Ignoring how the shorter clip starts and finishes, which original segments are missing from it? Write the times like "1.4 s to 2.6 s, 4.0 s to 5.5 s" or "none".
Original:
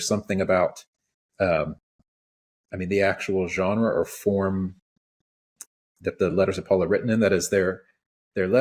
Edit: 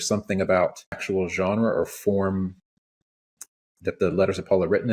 1.0 s to 3.2 s